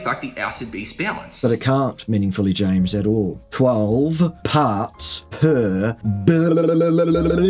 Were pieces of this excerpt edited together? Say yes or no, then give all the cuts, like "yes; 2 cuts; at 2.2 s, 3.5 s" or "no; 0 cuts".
no; 0 cuts